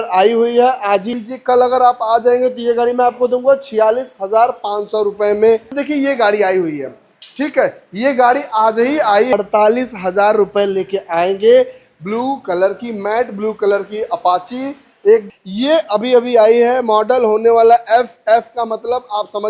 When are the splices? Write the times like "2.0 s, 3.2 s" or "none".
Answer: 1.1 s, 5.8 s, 9.3 s, 15.2 s

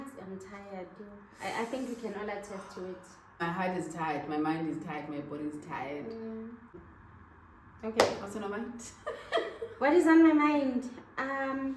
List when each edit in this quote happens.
3.4 s, 6.8 s

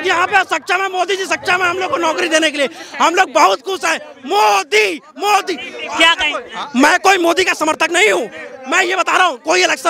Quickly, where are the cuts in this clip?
none

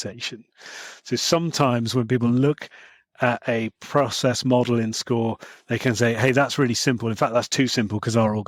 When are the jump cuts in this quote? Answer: none

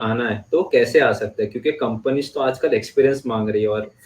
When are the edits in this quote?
none

